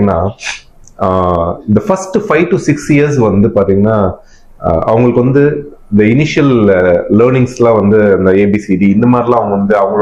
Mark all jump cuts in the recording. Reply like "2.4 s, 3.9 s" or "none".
none